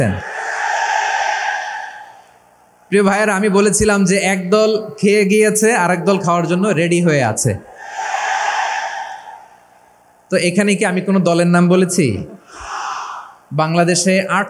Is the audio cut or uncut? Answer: uncut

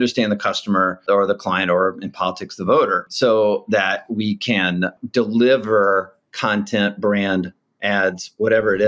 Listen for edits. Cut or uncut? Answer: cut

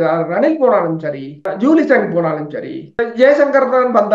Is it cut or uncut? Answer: cut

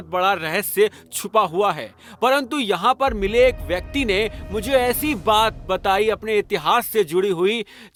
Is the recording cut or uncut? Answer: uncut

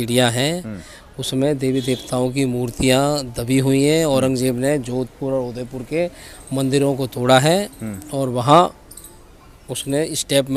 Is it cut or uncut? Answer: uncut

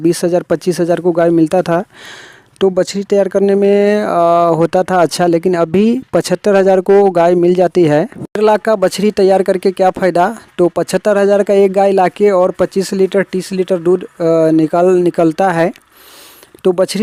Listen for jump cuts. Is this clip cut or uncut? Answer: uncut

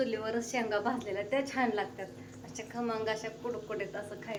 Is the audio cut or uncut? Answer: uncut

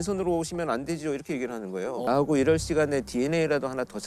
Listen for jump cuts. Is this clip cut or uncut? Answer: cut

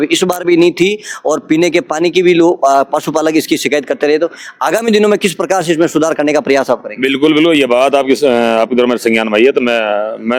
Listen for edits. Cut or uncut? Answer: uncut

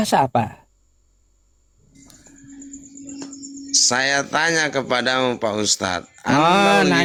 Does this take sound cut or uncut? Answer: uncut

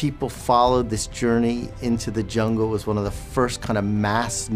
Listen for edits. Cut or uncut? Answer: uncut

